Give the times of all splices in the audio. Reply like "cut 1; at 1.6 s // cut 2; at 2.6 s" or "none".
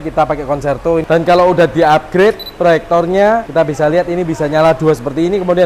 cut 1; at 1.0 s